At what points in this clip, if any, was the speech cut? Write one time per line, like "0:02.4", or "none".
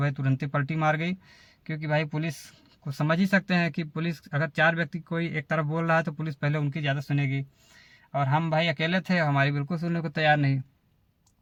none